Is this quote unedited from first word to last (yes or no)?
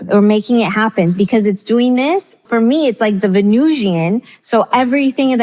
no